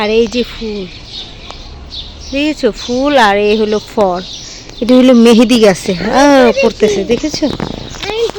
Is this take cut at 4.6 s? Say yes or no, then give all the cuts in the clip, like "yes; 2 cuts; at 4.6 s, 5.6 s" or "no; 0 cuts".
no; 0 cuts